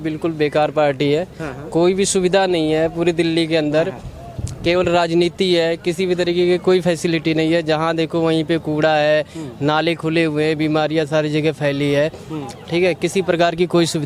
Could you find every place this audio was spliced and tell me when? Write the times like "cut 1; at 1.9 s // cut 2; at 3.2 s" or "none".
none